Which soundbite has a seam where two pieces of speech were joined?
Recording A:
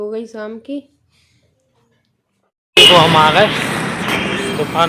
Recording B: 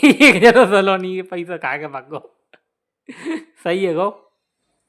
A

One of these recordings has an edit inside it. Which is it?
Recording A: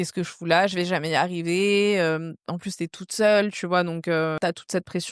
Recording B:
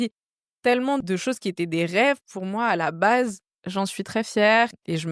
B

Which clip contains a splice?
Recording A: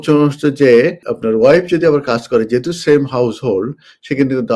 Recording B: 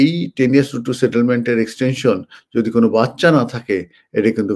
A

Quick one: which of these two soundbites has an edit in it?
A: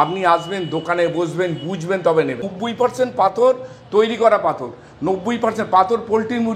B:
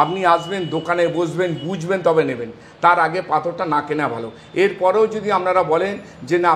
A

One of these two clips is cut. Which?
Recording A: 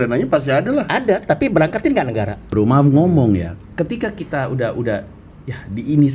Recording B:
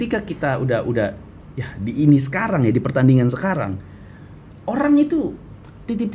A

